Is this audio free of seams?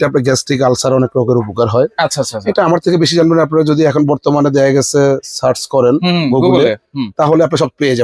yes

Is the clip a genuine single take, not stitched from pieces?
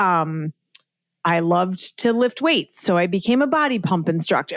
yes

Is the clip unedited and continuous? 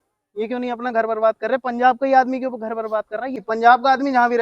no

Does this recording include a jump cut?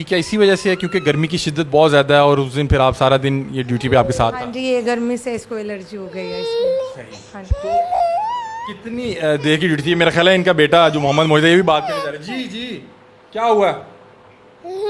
no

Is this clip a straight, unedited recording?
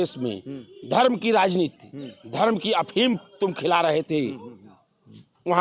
yes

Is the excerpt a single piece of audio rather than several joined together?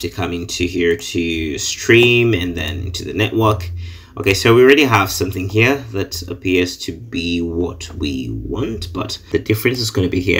no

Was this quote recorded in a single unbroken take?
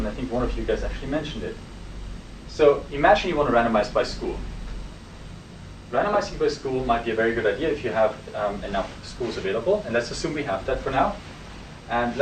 yes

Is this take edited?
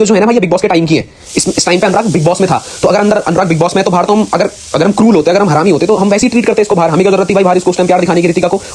no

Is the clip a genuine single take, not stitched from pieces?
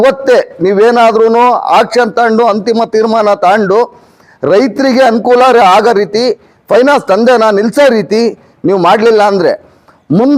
yes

